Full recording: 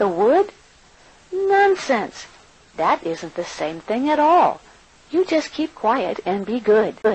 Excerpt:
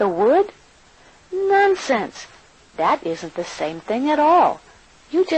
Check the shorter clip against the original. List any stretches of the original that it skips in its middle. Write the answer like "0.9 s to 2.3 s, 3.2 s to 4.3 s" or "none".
none